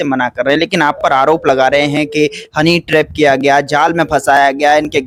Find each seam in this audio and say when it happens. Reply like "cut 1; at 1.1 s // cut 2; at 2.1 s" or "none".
none